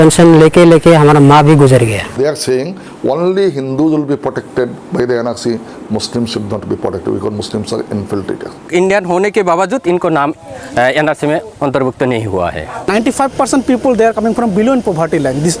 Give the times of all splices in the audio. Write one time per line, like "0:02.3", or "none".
0:02.1
0:08.7
0:12.9

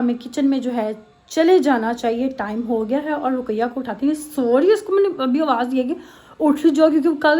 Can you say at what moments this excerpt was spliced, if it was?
none

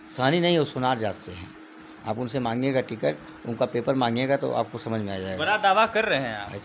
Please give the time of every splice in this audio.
none

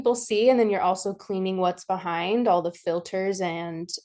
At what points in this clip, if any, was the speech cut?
none

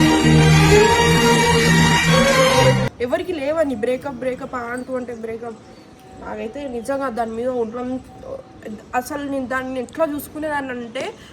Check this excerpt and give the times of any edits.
none

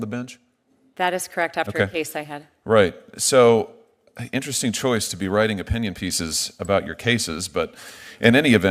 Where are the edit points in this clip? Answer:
none

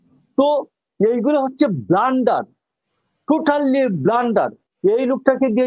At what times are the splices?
0:04.6

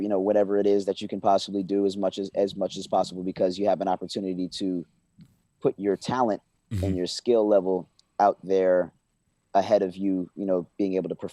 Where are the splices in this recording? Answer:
none

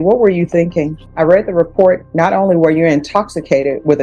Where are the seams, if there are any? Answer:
0:01.0

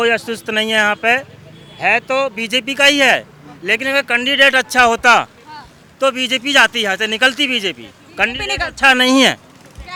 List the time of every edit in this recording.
none

